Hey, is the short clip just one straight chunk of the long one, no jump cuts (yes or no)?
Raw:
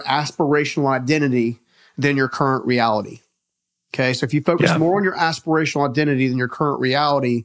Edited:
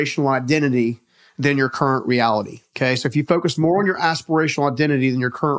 no